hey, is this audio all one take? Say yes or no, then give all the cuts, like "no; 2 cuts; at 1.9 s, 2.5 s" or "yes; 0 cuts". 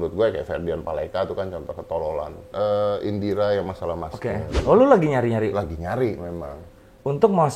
no; 2 cuts; at 2.4 s, 4.5 s